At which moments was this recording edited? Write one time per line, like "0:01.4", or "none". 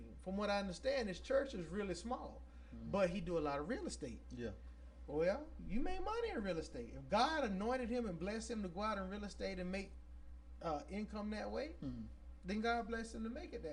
none